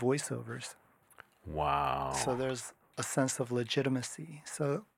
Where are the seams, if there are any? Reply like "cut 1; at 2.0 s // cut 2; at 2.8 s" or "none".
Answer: none